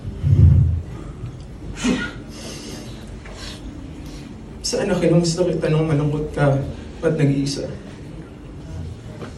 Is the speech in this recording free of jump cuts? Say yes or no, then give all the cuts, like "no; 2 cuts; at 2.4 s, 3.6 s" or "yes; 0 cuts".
yes; 0 cuts